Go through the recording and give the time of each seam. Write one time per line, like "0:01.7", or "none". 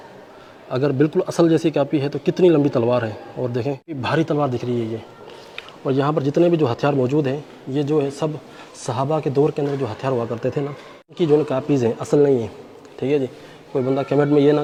none